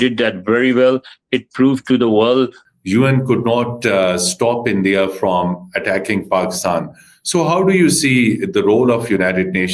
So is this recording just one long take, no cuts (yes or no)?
no